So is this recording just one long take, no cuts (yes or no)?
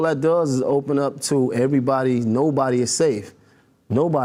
yes